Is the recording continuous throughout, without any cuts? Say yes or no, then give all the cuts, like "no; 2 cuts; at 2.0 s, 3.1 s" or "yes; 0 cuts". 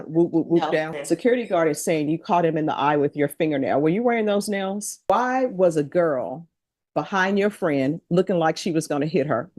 no; 2 cuts; at 1.0 s, 5.0 s